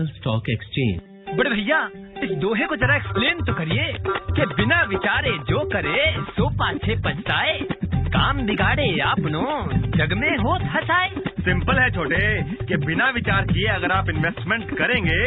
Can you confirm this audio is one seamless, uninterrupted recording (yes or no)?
no